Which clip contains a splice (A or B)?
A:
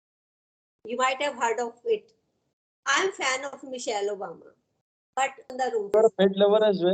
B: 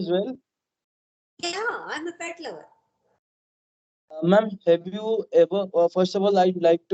A